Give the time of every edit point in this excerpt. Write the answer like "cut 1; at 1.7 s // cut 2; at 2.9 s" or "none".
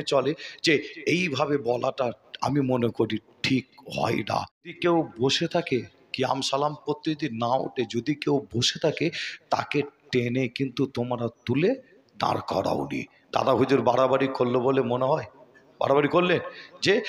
cut 1; at 4.8 s